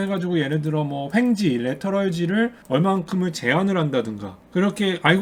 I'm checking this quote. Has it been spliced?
no; 0 cuts

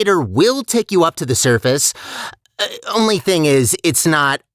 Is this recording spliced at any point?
no; 0 cuts

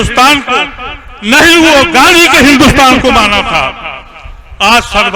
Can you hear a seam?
no; 0 cuts

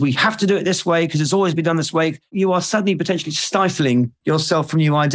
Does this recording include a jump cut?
yes; 2 cuts; at 2.3 s, 4.2 s

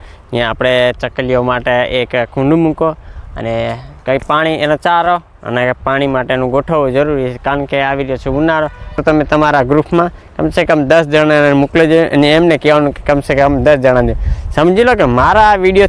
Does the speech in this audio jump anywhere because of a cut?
yes; 1 cut; at 9.0 s

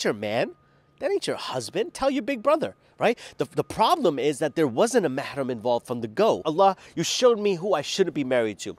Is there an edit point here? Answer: yes; 1 cut; at 6.4 s

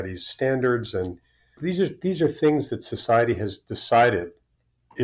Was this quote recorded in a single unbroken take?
no; 1 cut; at 1.6 s

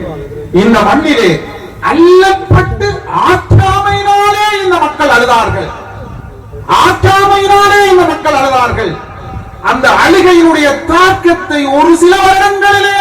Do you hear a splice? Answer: no; 0 cuts

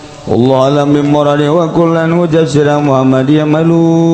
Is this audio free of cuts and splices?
yes; 0 cuts

